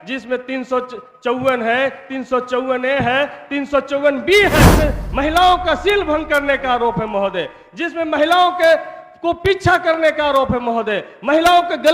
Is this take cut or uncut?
cut